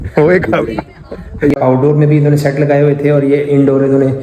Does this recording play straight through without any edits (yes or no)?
no